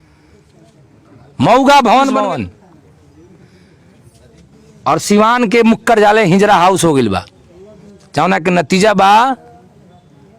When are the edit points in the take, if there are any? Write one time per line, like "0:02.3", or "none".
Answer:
0:02.2

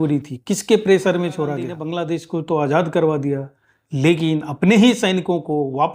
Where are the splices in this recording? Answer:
0:01.8

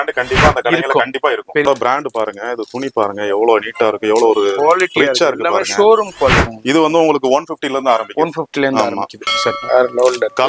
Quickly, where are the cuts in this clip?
0:01.7
0:06.5
0:09.6

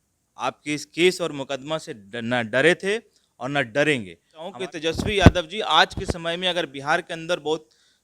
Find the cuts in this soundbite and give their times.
0:04.5

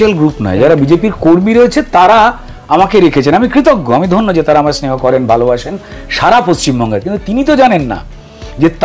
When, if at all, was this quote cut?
none

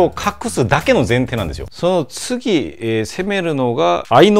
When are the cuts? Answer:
0:01.6

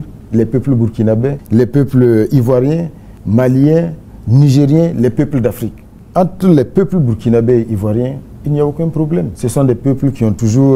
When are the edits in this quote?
0:06.0

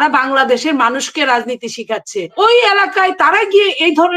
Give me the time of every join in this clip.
0:02.3

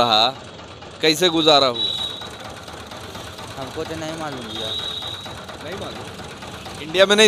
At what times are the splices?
none

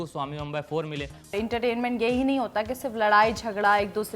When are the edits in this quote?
0:01.3

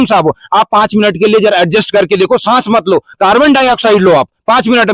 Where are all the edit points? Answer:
none

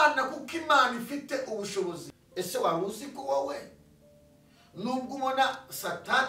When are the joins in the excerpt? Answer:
0:02.1

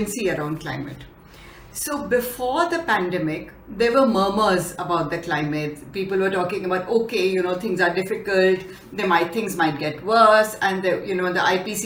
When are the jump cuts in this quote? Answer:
none

